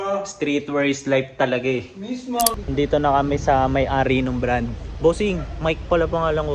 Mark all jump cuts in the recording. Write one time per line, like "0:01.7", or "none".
0:02.6